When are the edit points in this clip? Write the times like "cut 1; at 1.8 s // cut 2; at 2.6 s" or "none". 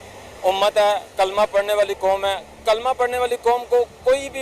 none